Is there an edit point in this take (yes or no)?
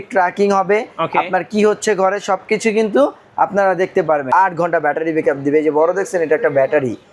yes